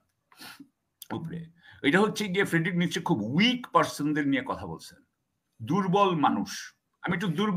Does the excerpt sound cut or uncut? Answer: uncut